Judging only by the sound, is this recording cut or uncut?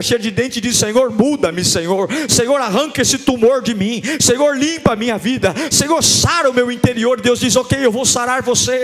uncut